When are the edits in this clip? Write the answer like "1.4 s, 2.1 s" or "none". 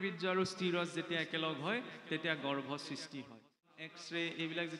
3.7 s